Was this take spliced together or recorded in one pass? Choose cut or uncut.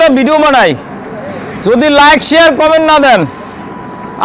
uncut